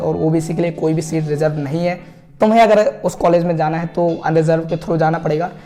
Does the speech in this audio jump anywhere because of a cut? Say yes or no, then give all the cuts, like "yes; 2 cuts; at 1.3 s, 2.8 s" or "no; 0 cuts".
no; 0 cuts